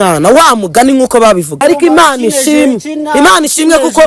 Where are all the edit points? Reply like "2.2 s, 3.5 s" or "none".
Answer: 1.5 s